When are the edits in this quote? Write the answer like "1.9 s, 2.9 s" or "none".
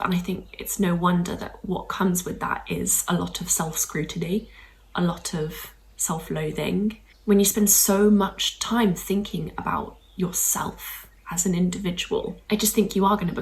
7.1 s, 12.4 s